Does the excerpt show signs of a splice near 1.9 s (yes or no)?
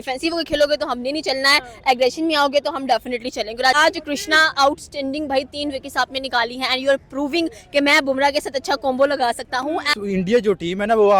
no